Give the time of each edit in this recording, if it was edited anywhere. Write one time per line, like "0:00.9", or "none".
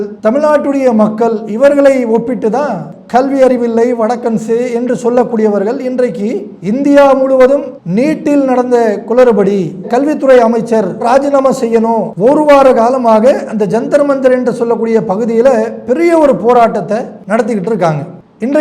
0:02.8
0:12.1
0:17.1